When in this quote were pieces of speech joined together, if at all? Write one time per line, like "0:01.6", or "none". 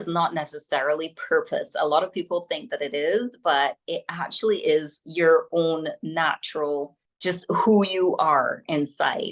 0:07.0

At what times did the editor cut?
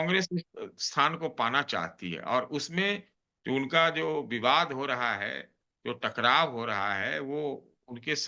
none

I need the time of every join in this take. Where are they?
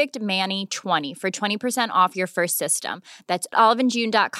0:01.1

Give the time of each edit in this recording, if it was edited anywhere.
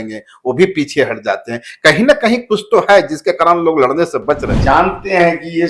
0:04.5

